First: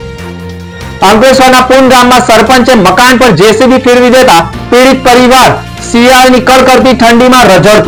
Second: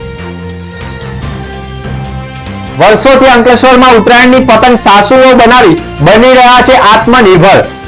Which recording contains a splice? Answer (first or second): second